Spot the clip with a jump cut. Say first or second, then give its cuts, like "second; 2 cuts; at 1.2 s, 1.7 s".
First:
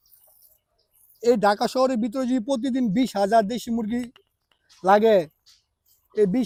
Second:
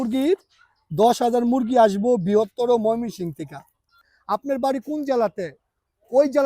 second; 1 cut; at 4.1 s